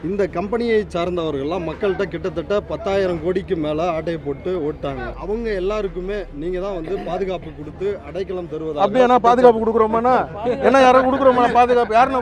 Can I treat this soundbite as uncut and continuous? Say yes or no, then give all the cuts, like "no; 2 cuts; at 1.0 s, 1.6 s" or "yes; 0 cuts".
no; 1 cut; at 5.1 s